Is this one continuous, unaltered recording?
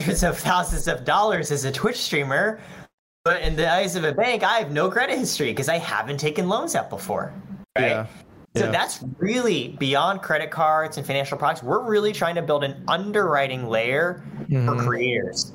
yes; 0 cuts

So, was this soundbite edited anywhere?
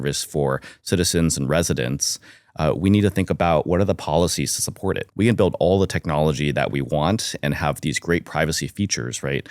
yes; 1 cut; at 5.1 s

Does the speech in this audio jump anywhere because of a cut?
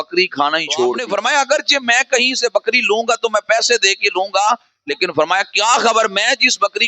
yes; 1 cut; at 1.0 s

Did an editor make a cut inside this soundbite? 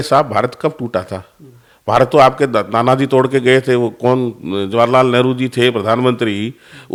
no; 0 cuts

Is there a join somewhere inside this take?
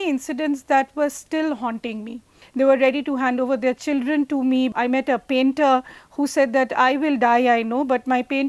yes; 2 cuts; at 2.4 s, 4.7 s

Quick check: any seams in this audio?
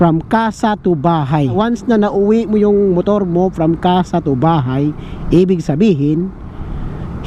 yes; 1 cut; at 1.5 s

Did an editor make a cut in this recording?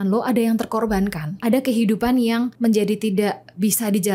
yes; 1 cut; at 1.3 s

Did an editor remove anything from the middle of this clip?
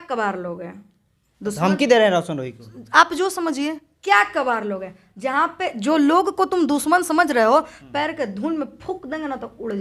no; 0 cuts

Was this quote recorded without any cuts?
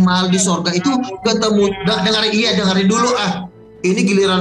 yes; 0 cuts

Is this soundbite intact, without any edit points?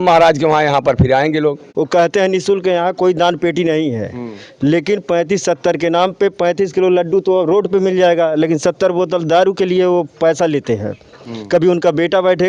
no; 1 cut; at 1.6 s

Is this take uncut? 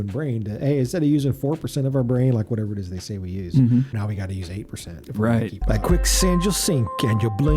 no; 2 cuts; at 4.0 s, 5.6 s

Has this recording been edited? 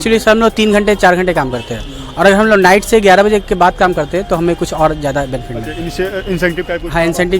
no; 0 cuts

